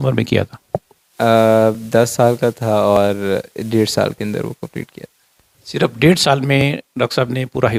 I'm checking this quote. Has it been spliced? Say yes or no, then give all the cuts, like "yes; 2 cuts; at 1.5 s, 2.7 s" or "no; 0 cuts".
no; 0 cuts